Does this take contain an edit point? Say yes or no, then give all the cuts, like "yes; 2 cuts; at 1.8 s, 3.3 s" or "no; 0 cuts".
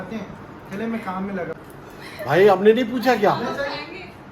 yes; 1 cut; at 1.5 s